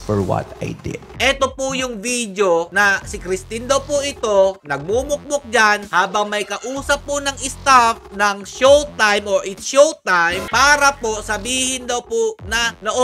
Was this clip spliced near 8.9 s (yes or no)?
no